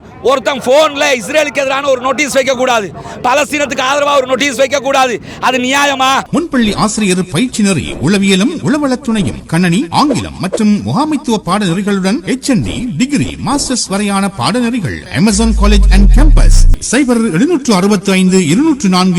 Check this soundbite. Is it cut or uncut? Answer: cut